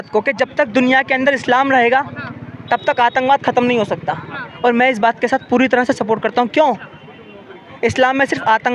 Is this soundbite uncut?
yes; 0 cuts

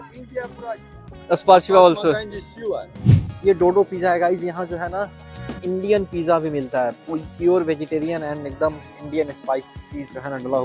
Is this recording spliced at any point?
yes; 1 cut; at 3.3 s

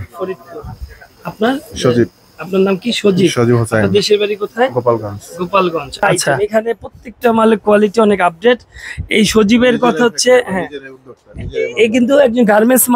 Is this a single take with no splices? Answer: no; 1 cut; at 6.2 s

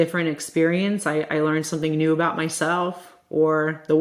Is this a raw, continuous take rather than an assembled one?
yes; 0 cuts

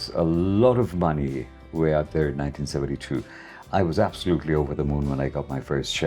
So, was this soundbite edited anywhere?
no; 0 cuts

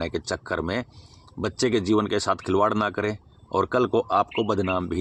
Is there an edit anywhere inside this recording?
no; 0 cuts

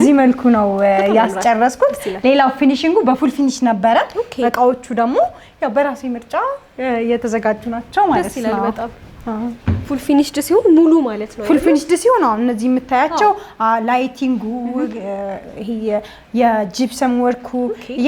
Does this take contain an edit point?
no; 0 cuts

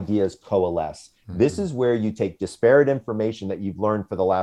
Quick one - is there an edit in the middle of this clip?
no; 0 cuts

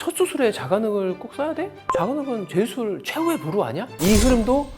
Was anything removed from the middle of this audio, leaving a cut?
yes; 1 cut; at 3.9 s

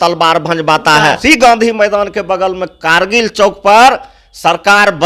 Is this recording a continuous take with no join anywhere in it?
no; 1 cut; at 1.2 s

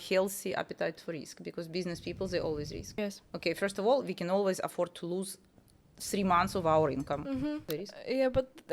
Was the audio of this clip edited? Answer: yes; 2 cuts; at 3.0 s, 7.6 s

